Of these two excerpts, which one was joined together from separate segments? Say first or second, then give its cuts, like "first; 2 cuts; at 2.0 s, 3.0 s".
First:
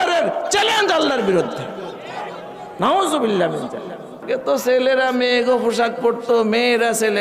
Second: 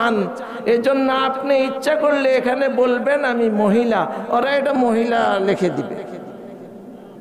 first; 1 cut; at 4.2 s